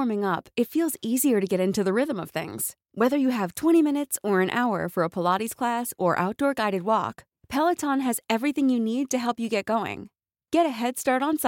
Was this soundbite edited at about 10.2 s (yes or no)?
no